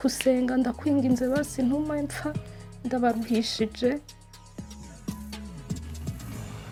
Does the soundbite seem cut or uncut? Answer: uncut